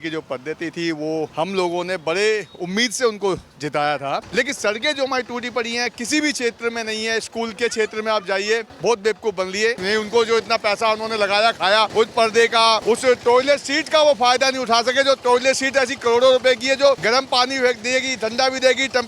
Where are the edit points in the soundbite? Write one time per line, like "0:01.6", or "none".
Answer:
0:01.3
0:04.3
0:08.7
0:09.8
0:11.9
0:12.8
0:17.0